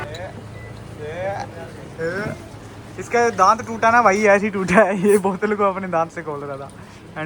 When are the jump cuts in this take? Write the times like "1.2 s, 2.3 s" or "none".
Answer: none